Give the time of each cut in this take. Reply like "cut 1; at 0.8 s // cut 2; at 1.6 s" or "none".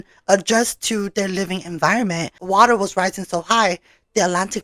cut 1; at 2.4 s